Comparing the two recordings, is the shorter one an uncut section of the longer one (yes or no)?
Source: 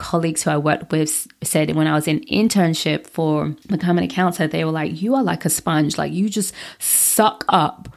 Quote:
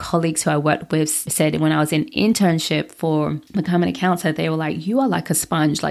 no